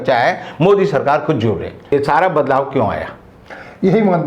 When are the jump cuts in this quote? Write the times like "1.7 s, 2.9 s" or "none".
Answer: 1.9 s